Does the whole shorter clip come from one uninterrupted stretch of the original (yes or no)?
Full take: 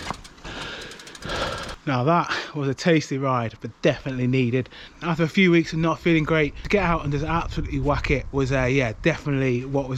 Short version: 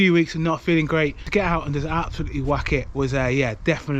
yes